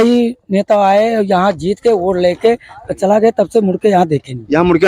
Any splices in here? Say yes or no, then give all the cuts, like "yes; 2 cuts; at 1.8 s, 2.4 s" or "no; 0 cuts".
no; 0 cuts